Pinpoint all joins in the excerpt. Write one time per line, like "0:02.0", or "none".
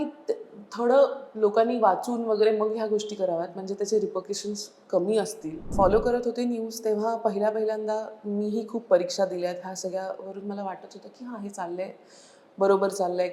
0:05.6